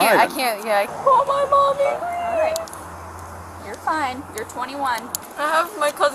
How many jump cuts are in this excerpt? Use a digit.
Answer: 2